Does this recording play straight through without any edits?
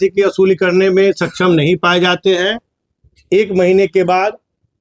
yes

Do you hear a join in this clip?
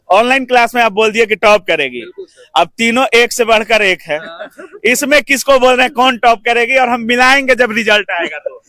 no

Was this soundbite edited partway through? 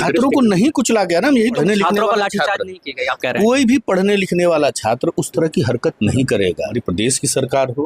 yes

